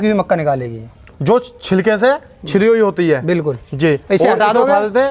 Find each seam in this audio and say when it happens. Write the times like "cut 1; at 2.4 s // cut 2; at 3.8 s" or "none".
none